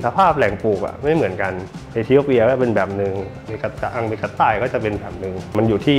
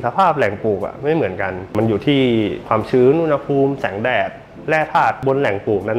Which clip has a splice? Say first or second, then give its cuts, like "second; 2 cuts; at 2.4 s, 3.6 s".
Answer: second; 3 cuts; at 1.6 s, 2.6 s, 5.2 s